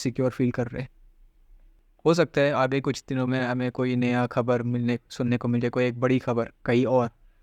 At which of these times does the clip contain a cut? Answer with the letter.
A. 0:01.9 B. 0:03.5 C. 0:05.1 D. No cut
A